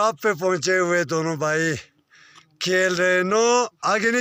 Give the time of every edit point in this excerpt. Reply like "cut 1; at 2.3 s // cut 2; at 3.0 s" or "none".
none